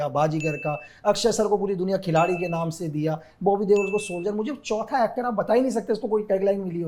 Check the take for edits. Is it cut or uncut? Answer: uncut